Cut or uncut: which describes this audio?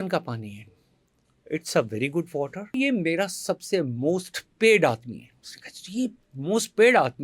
cut